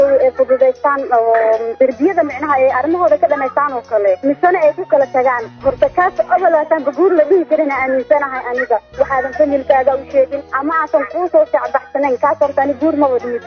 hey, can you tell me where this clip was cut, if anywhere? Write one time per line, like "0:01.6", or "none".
0:01.7
0:04.2
0:10.5